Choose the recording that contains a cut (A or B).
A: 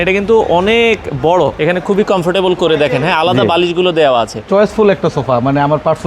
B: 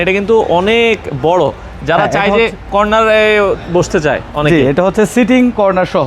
A